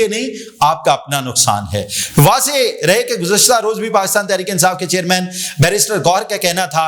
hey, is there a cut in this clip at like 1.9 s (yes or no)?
no